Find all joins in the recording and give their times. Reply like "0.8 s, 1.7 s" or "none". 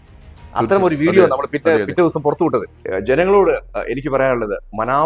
2.8 s